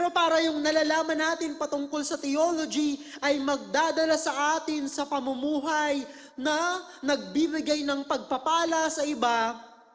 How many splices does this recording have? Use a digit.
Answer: 0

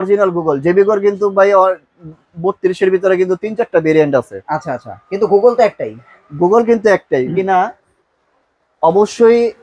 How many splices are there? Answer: 1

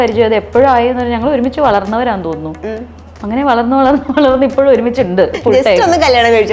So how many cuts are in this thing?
1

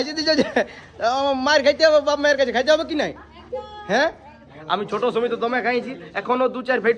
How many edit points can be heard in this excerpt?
1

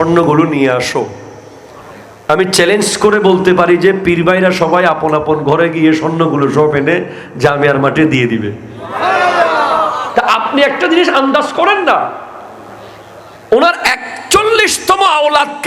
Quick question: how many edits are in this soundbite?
0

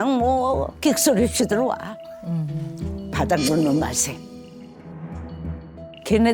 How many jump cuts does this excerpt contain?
1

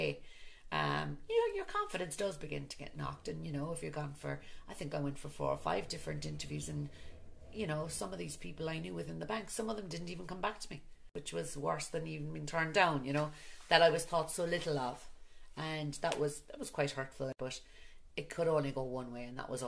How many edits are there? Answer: 1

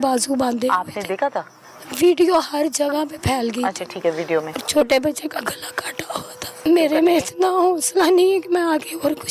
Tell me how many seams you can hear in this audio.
2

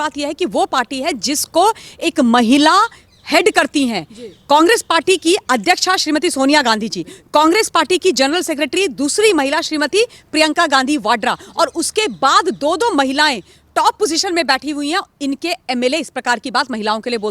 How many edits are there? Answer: 0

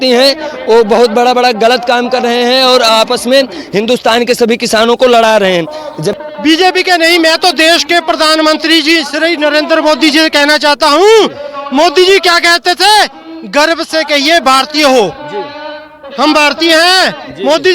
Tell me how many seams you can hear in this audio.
1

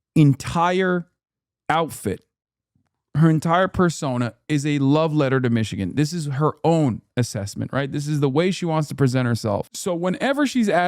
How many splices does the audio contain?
1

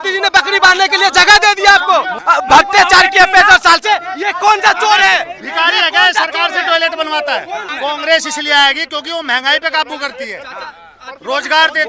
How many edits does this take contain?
2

